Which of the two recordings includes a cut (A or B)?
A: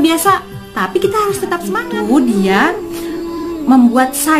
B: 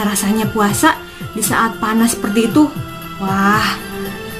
A